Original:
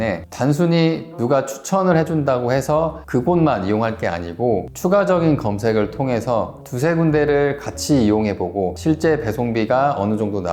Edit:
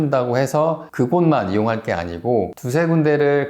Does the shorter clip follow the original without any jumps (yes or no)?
no